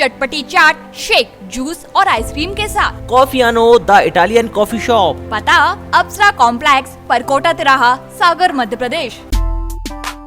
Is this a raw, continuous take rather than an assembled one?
no; 1 cut; at 9.2 s

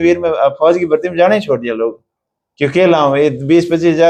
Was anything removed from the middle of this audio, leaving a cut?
no; 0 cuts

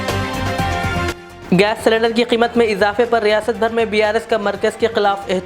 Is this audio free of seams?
no; 1 cut; at 1.1 s

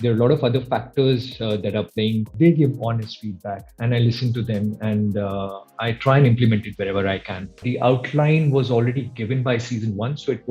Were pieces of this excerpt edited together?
yes; 2 cuts; at 2.3 s, 7.6 s

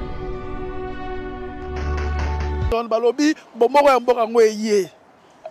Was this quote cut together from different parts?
no; 0 cuts

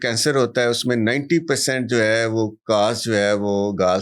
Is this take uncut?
yes; 0 cuts

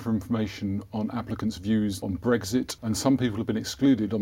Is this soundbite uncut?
no; 2 cuts; at 2.0 s, 2.7 s

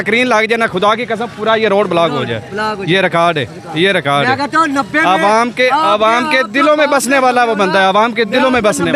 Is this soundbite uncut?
yes; 0 cuts

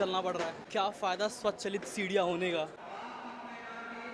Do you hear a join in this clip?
no; 0 cuts

